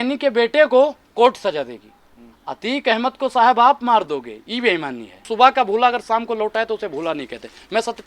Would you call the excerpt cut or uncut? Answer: cut